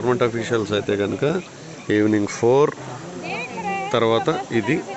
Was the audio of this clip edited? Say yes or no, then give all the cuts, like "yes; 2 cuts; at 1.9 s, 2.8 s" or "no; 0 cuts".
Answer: no; 0 cuts